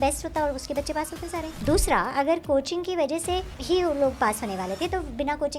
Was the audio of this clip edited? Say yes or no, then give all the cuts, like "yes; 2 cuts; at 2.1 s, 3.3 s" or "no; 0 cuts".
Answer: yes; 2 cuts; at 1.6 s, 3.5 s